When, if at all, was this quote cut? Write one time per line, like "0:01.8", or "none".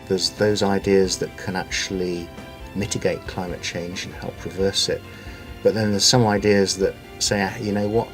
none